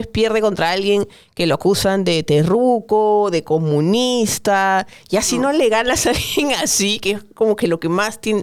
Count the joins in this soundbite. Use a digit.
0